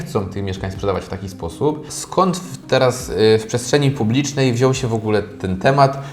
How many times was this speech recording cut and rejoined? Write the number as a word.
one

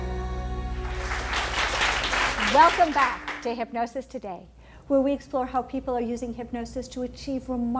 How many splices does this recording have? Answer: zero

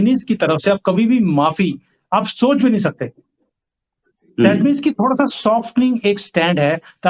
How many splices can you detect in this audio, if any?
zero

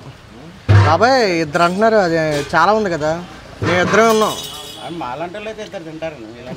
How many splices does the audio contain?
zero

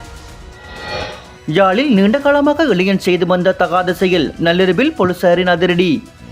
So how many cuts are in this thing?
one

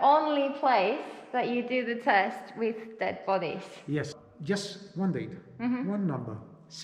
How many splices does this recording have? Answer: one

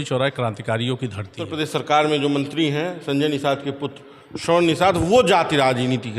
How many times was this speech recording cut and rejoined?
one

